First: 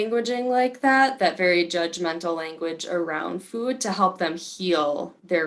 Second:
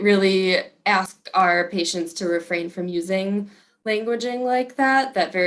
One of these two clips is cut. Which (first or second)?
second